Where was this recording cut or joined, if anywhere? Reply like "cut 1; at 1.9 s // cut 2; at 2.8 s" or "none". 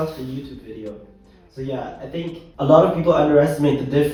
none